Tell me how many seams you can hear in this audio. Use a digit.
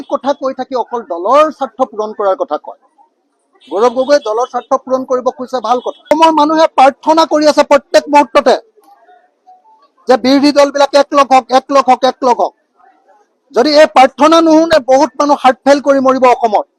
1